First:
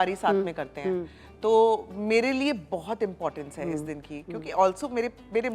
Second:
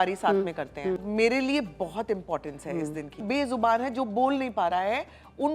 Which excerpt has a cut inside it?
second; 2 cuts; at 1.0 s, 3.2 s

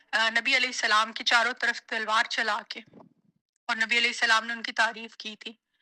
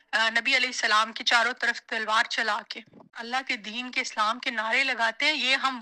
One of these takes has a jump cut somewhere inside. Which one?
second; 1 cut; at 3.3 s

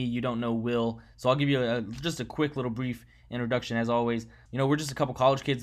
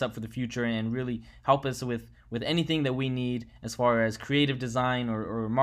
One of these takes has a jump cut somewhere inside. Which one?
first; 1 cut; at 4.4 s

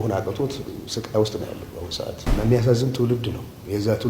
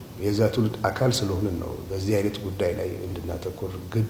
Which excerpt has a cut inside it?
first; 1 cut; at 2.2 s

